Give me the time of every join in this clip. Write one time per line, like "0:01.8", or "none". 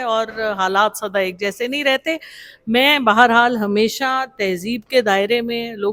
none